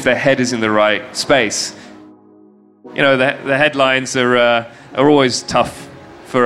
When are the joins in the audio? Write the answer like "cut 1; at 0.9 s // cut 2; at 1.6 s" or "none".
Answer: cut 1; at 2.2 s